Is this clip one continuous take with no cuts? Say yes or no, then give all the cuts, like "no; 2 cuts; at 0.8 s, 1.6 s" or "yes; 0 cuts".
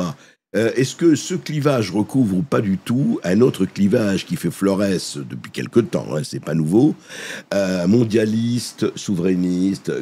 yes; 0 cuts